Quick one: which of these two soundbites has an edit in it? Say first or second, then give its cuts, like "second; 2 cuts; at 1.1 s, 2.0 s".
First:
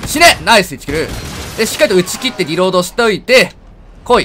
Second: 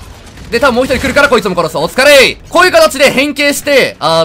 second; 1 cut; at 2.4 s